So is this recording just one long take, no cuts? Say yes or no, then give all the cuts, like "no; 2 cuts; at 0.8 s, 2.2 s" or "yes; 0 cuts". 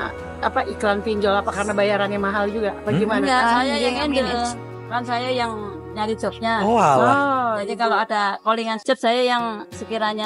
yes; 0 cuts